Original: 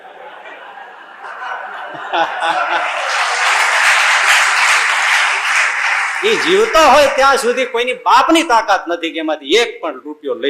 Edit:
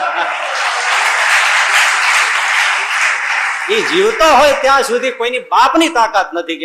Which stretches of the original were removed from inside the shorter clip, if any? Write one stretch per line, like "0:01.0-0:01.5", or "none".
none